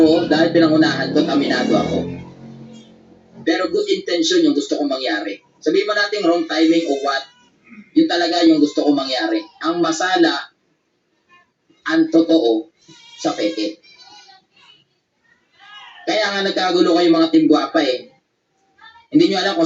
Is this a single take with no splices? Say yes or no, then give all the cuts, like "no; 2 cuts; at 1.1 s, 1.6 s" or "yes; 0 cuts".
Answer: yes; 0 cuts